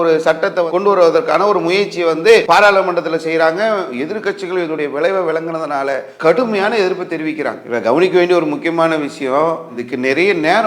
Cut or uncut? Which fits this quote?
cut